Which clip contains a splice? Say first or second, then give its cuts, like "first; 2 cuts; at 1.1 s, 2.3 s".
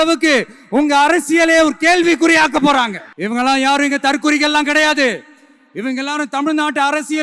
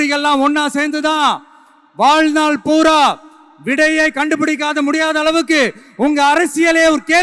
first; 1 cut; at 3.0 s